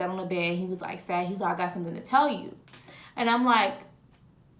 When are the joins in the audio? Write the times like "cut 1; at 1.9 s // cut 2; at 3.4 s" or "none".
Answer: none